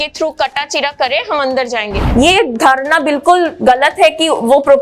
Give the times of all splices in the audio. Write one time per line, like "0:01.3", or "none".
0:02.0